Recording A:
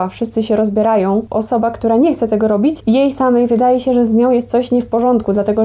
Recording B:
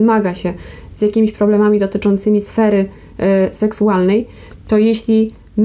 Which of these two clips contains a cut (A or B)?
A